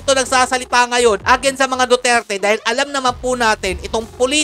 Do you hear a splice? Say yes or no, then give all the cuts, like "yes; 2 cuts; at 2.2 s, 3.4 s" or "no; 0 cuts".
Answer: no; 0 cuts